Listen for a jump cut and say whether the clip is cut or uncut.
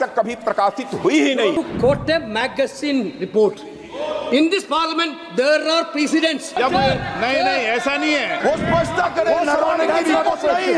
cut